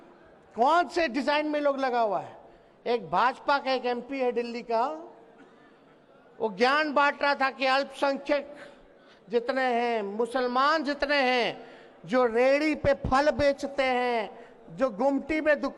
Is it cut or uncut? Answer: uncut